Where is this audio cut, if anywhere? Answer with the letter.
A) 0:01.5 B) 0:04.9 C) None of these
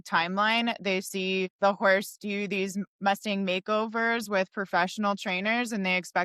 A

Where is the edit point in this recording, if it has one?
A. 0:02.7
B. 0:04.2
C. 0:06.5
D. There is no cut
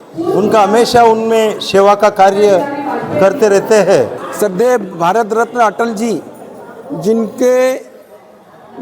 B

